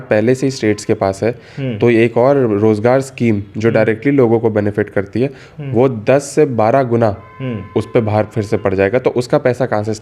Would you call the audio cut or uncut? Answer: uncut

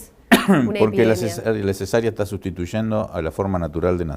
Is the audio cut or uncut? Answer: cut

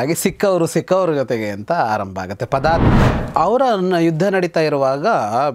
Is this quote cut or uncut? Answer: cut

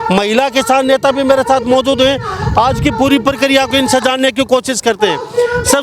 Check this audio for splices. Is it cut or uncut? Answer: uncut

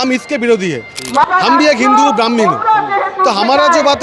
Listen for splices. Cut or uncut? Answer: cut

